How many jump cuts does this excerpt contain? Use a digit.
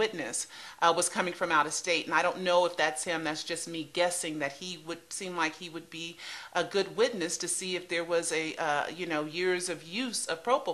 1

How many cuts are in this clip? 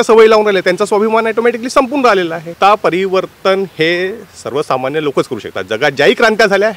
1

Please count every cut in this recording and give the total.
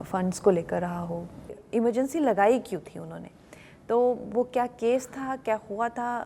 1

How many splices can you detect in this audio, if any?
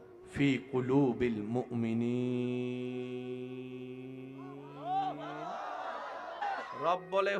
0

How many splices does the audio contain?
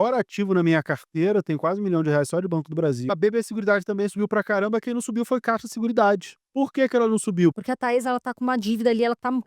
3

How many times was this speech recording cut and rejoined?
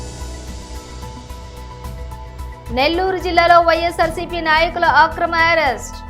1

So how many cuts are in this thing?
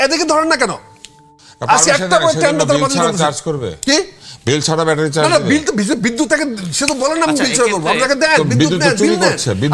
0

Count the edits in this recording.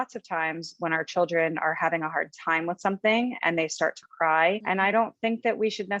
1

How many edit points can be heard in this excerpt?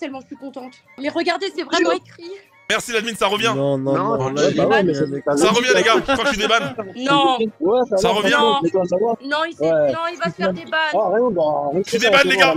2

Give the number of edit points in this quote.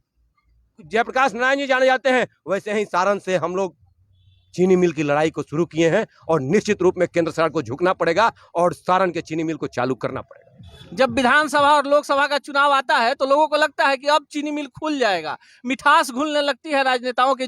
0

